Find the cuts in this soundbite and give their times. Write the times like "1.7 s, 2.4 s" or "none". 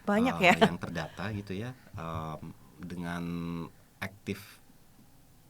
none

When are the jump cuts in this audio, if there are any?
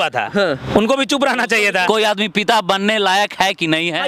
1.8 s

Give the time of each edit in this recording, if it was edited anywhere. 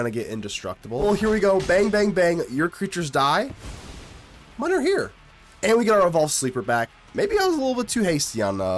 1.0 s, 5.2 s, 7.0 s

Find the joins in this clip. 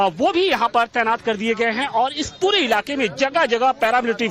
1.4 s

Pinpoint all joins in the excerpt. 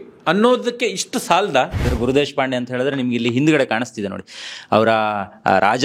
1.9 s

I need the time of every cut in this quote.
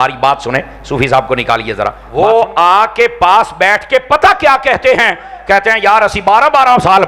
2.0 s

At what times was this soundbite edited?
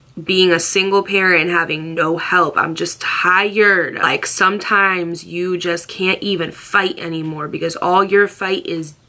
3.9 s

